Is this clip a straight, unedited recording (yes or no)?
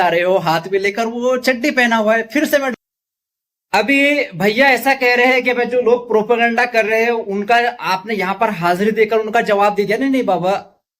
no